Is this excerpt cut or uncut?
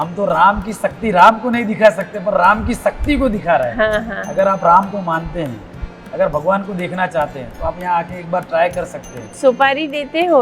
cut